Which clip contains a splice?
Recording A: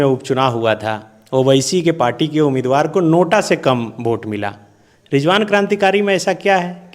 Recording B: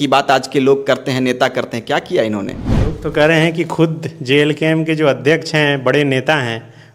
B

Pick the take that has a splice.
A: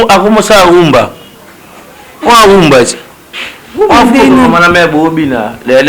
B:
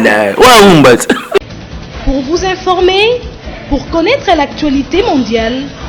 B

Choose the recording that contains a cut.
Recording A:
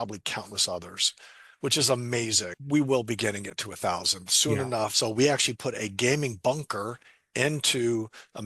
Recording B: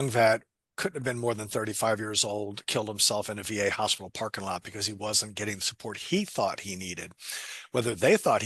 A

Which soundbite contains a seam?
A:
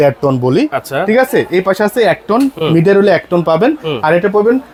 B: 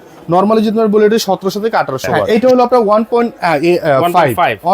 B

